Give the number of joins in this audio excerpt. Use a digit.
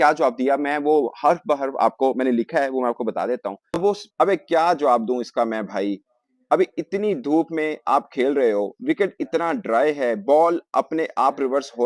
1